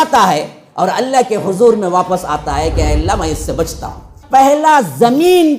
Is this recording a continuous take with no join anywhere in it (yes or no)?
no